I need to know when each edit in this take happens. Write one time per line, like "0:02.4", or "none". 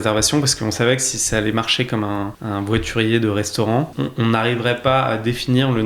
0:02.4
0:03.9